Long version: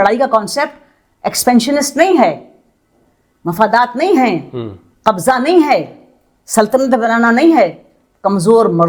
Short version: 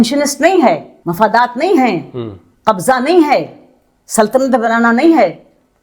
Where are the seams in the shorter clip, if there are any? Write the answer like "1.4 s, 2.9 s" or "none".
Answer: 1.0 s